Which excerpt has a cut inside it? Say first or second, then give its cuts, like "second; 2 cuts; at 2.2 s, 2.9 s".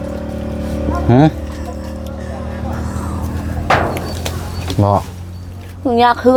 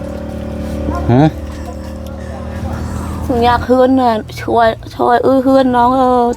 second; 1 cut; at 3.2 s